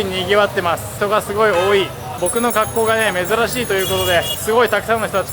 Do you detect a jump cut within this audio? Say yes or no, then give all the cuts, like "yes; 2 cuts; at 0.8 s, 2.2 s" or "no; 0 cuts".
yes; 3 cuts; at 0.9 s, 2.2 s, 4.3 s